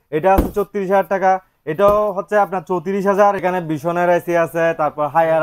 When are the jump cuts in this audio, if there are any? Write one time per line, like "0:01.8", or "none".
0:03.4